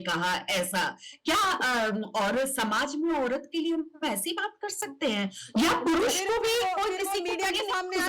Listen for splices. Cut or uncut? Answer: uncut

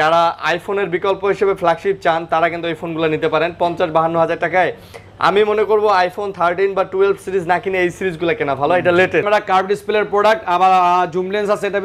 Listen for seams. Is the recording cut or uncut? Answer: cut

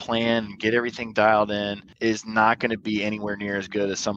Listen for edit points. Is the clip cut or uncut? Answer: cut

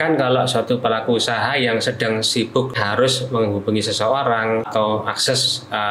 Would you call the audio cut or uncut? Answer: cut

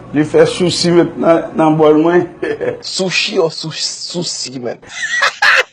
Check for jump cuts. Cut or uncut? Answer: uncut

